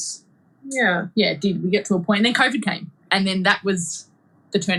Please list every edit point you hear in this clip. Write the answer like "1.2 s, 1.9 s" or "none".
none